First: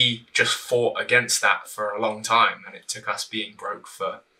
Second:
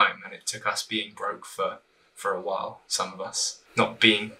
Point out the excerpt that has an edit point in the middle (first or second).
second